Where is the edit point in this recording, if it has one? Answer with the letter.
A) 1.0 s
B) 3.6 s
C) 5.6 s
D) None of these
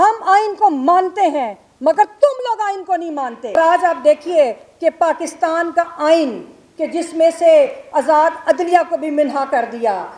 B